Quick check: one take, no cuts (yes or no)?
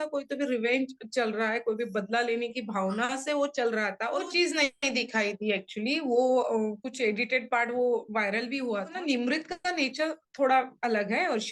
no